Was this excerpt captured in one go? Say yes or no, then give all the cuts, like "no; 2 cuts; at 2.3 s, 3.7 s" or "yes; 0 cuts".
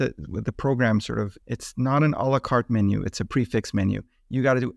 no; 1 cut; at 1.4 s